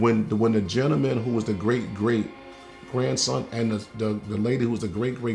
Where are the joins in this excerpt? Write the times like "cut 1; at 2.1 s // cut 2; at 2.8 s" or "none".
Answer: none